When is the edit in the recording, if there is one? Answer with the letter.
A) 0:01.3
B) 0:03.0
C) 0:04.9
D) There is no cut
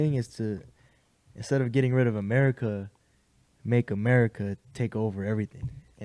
D